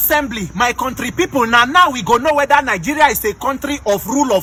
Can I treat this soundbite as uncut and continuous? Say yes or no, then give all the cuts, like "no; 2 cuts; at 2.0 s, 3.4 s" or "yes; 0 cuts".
yes; 0 cuts